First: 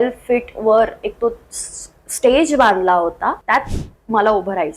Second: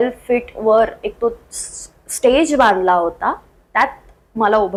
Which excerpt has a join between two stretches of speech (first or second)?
first